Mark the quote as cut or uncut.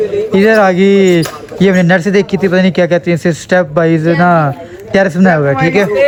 uncut